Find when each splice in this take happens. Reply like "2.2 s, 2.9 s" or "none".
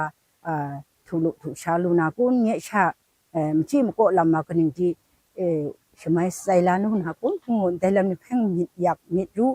none